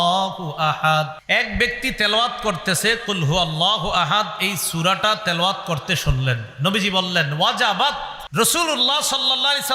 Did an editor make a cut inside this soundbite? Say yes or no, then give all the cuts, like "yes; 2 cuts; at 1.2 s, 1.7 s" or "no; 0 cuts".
yes; 2 cuts; at 1.2 s, 8.2 s